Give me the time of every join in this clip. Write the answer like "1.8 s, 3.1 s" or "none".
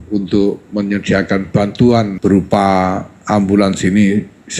2.1 s